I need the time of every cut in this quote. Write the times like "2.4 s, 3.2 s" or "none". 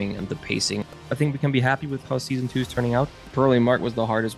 1.0 s, 3.3 s